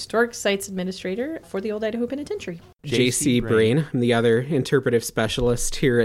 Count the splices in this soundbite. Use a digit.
2